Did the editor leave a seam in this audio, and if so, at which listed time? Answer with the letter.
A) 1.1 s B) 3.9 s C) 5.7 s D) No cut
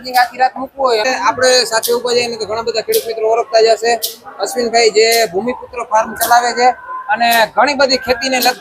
A